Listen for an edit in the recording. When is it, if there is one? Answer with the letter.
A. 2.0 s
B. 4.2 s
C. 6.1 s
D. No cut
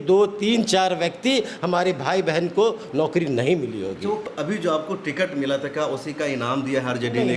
B